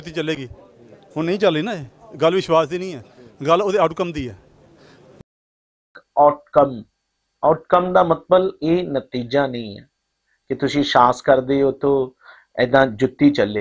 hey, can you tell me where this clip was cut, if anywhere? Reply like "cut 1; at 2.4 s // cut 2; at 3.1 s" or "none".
cut 1; at 5.7 s